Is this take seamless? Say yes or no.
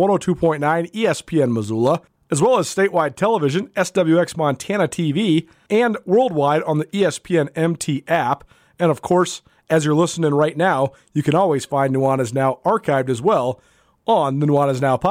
no